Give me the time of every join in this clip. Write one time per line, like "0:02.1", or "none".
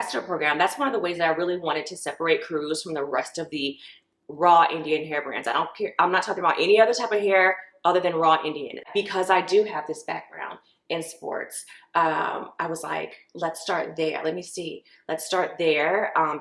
0:08.9